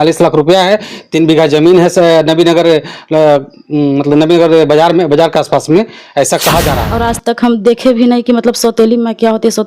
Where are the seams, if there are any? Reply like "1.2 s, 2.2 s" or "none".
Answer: 6.8 s